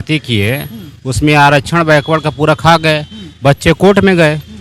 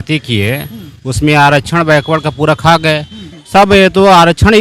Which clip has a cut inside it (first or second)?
second